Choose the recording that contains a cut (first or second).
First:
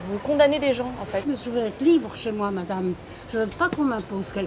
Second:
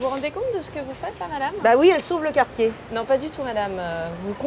first